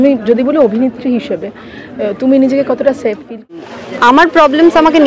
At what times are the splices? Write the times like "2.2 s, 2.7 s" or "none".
3.6 s